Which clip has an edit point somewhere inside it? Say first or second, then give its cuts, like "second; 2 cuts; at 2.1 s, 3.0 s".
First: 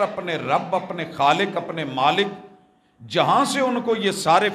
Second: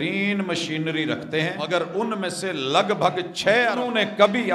second; 2 cuts; at 1.6 s, 3.8 s